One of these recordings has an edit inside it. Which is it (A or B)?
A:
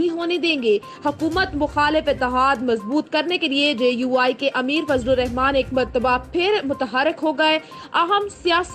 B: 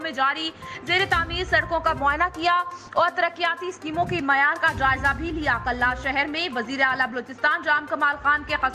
A